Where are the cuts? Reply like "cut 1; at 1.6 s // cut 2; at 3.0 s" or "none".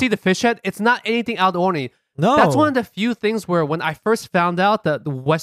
none